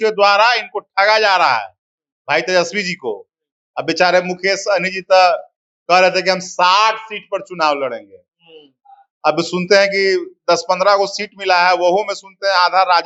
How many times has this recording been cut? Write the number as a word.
zero